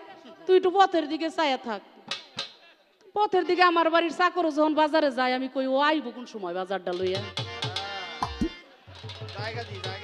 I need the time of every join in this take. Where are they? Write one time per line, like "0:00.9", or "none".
none